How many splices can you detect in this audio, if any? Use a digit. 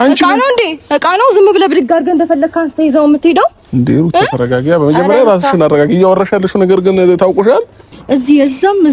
1